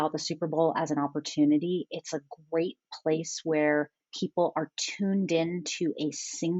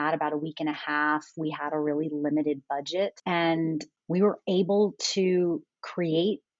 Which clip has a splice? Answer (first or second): second